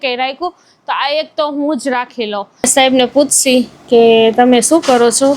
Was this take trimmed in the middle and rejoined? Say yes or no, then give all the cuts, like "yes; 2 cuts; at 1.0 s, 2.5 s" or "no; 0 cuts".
yes; 1 cut; at 2.5 s